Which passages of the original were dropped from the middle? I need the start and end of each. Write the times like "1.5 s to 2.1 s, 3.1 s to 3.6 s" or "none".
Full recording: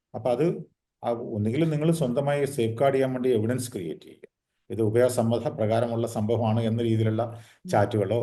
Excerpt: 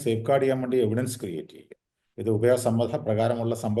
none